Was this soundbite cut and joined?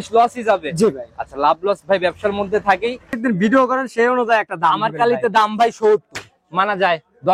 yes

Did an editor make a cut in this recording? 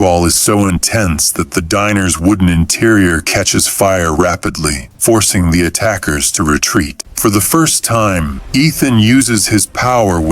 yes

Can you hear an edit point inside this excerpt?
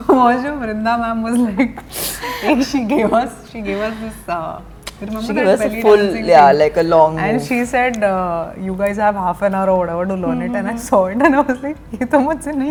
no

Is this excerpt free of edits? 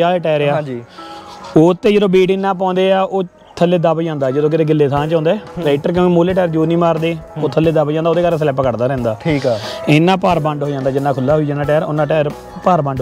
yes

